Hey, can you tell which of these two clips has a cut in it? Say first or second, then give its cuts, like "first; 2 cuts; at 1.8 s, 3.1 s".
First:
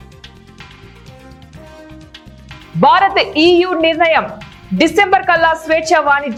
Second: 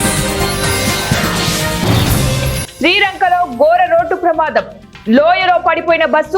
second; 2 cuts; at 1.3 s, 2.6 s